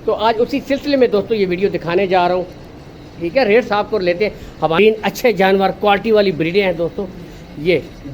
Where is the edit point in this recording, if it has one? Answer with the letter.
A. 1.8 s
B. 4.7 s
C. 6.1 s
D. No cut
B